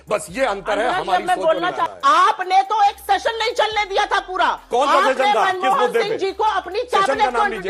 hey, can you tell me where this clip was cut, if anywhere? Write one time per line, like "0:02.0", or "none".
0:01.9